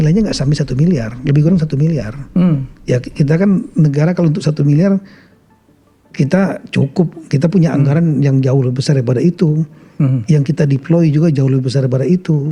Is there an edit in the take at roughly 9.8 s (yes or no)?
no